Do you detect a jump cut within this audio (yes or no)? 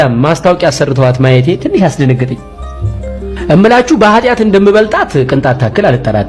no